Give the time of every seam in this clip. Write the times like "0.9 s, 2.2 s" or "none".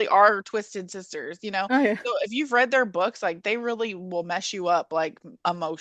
none